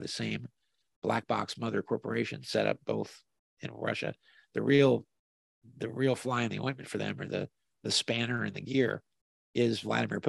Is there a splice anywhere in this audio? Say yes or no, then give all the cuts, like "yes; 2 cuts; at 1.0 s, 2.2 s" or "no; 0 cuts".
no; 0 cuts